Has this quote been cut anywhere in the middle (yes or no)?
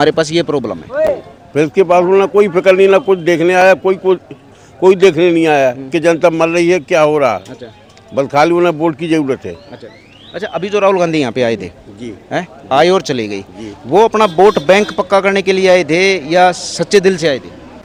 no